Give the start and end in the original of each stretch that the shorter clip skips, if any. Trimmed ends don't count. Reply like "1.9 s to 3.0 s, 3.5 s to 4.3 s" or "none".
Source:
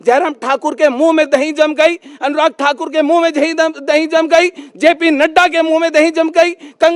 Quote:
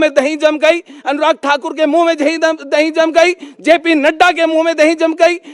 none